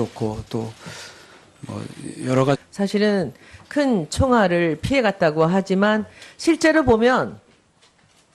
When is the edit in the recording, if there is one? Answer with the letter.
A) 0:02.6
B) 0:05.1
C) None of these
C